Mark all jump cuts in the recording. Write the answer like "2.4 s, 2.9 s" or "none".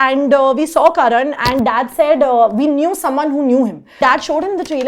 4.0 s